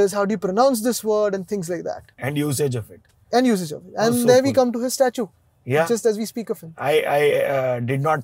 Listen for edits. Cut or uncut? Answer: uncut